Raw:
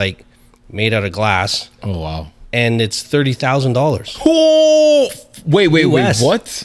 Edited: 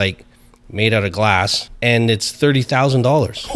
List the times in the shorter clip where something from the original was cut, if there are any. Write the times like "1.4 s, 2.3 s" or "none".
1.6 s